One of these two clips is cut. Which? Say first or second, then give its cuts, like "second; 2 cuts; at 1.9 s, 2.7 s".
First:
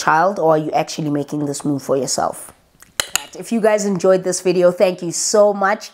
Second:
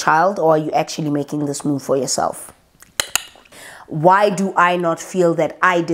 second; 1 cut; at 3.4 s